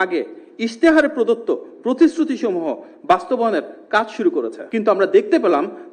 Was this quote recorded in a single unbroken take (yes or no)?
no